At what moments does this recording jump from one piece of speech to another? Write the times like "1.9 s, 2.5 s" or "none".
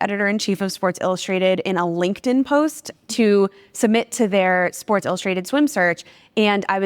none